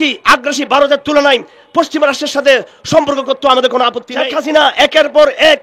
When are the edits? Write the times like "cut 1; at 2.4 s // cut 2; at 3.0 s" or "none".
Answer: cut 1; at 4.0 s